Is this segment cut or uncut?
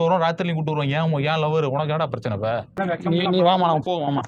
cut